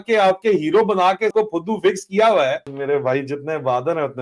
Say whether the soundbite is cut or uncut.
cut